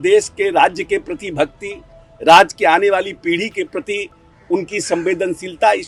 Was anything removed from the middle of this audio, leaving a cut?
no; 0 cuts

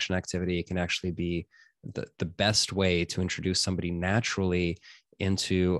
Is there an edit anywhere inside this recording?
no; 0 cuts

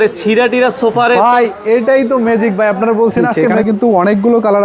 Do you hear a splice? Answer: yes; 1 cut; at 3.5 s

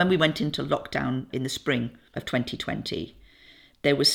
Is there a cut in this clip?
no; 0 cuts

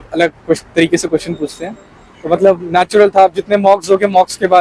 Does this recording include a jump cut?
no; 0 cuts

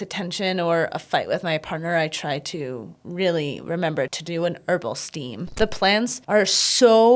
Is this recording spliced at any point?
yes; 3 cuts; at 4.2 s, 5.4 s, 6.2 s

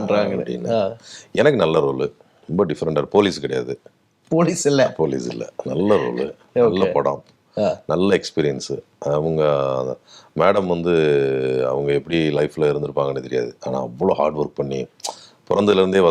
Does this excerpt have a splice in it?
no; 0 cuts

